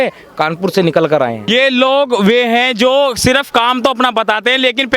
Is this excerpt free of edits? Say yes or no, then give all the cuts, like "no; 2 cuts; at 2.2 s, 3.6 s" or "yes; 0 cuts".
no; 1 cut; at 1.5 s